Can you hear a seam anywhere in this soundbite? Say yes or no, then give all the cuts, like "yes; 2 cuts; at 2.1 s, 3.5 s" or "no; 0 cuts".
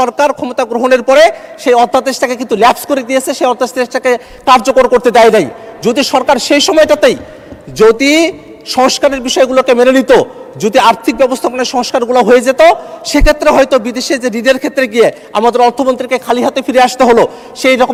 no; 0 cuts